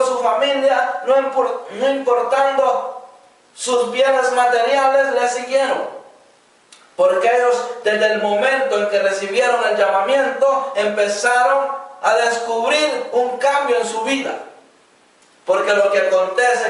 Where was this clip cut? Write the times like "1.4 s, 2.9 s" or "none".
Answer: none